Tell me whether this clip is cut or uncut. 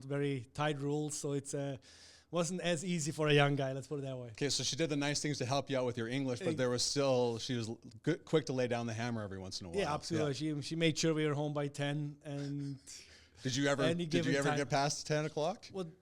uncut